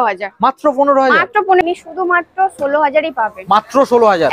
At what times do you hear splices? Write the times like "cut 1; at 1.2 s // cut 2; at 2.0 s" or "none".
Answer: cut 1; at 1.6 s